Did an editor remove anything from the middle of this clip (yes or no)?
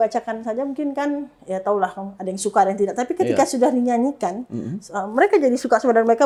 no